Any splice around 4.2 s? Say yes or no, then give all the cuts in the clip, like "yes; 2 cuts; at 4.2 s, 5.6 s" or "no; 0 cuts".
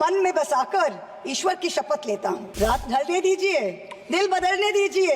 no; 1 cut; at 2.5 s